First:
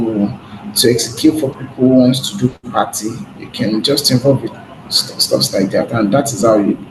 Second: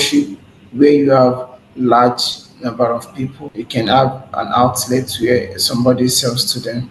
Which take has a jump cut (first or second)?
second